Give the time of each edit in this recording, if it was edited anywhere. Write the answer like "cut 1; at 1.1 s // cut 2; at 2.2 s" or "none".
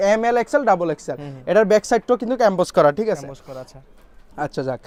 none